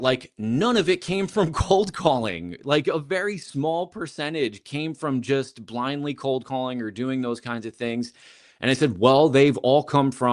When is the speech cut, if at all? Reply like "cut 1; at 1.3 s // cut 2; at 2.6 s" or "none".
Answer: none